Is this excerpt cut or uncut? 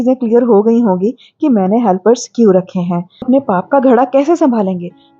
cut